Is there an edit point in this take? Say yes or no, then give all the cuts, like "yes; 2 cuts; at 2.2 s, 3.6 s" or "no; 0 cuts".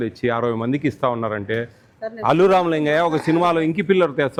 no; 0 cuts